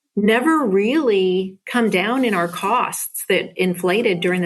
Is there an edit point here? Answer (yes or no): no